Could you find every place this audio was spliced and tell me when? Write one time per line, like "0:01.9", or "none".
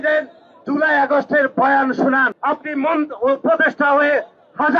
0:02.3